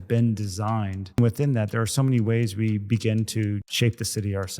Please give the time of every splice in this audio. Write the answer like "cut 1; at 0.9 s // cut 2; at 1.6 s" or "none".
cut 1; at 1.2 s // cut 2; at 3.7 s

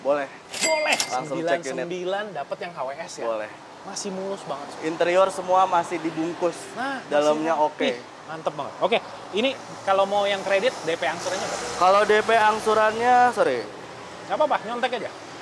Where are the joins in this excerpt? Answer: none

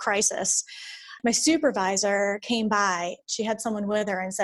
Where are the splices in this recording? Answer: cut 1; at 1.1 s // cut 2; at 3.2 s

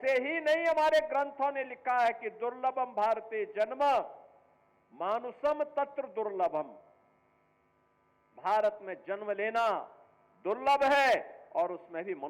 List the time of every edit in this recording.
none

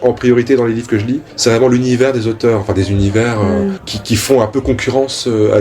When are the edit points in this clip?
cut 1; at 1.2 s // cut 2; at 3.9 s

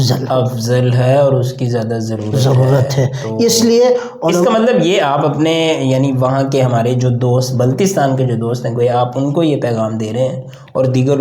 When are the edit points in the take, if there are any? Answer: none

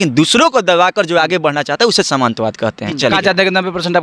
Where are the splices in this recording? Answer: cut 1; at 3.0 s

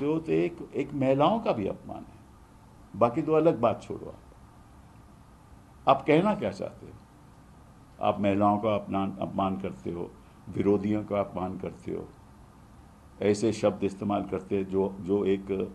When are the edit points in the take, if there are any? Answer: none

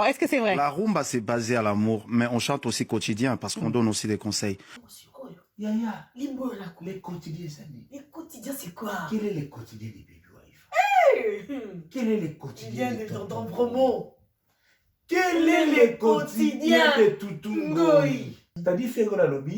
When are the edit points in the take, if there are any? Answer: cut 1; at 18.5 s

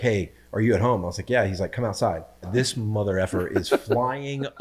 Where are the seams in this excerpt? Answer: cut 1; at 2.5 s

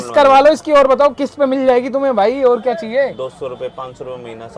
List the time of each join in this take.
none

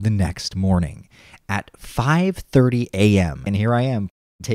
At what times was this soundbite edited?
cut 1; at 3.4 s

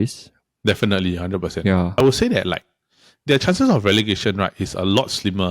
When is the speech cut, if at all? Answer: cut 1; at 2.0 s

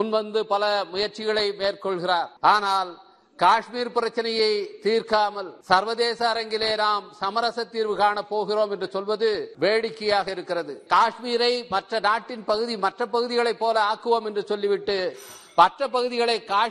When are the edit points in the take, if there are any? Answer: cut 1; at 2.3 s // cut 2; at 5.5 s // cut 3; at 9.5 s // cut 4; at 10.9 s

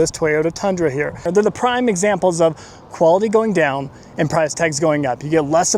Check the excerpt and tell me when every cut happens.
cut 1; at 1.3 s

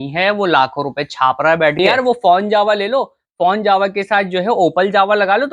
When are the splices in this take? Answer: cut 1; at 1.8 s

